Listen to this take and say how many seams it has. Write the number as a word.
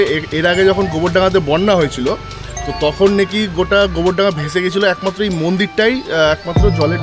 zero